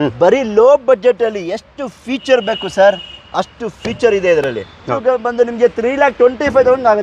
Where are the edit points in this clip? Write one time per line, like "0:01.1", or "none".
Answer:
0:04.8